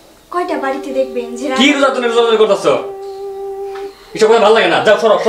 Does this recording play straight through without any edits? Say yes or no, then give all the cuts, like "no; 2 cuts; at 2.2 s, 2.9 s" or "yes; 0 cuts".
no; 2 cuts; at 2.8 s, 4.0 s